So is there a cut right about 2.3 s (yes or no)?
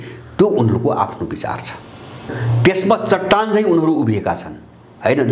yes